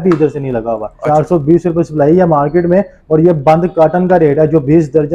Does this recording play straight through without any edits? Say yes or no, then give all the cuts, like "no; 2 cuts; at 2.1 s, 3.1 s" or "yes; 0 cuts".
no; 1 cut; at 0.9 s